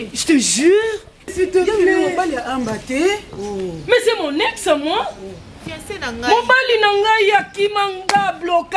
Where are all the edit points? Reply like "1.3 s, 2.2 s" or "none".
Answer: 1.3 s